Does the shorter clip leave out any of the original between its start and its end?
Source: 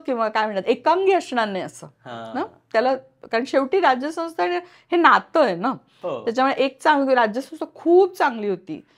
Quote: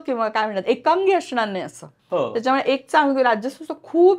yes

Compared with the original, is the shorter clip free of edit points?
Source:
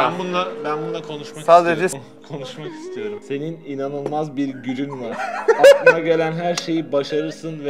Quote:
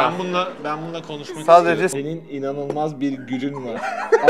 no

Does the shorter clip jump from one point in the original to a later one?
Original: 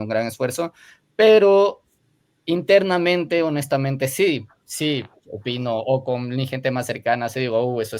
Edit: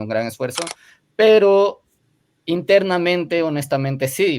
no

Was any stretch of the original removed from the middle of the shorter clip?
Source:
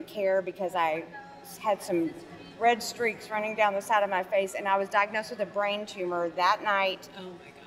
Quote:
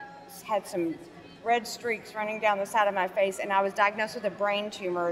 no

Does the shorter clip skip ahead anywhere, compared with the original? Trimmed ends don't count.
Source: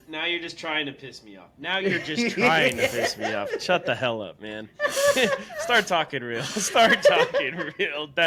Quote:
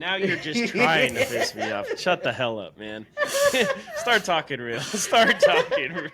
no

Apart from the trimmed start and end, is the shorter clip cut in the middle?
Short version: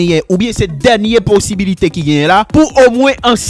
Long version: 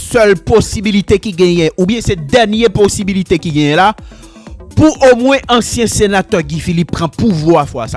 yes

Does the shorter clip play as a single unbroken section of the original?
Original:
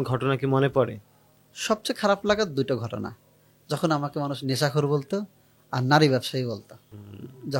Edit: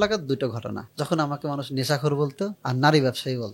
no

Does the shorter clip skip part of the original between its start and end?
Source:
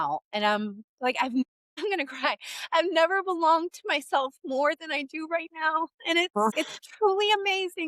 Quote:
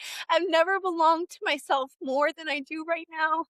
no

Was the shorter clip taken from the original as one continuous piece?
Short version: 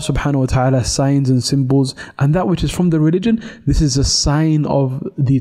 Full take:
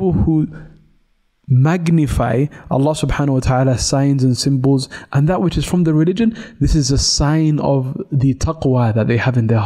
yes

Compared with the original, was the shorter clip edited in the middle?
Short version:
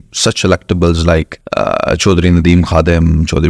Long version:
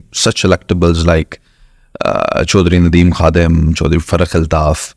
yes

